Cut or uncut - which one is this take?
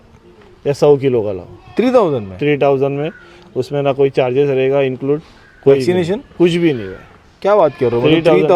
uncut